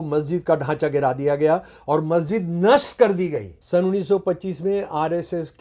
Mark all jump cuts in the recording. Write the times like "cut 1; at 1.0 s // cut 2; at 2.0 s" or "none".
cut 1; at 3.5 s